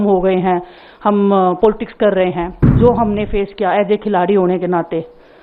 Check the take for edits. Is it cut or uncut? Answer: cut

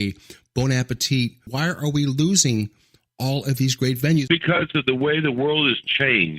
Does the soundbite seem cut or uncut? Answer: cut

